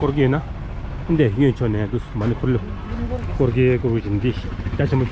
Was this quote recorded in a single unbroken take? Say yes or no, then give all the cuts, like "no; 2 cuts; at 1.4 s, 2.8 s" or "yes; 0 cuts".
yes; 0 cuts